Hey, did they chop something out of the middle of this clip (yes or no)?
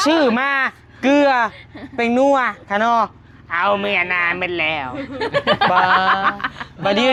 no